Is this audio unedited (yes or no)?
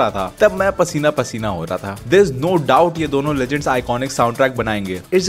yes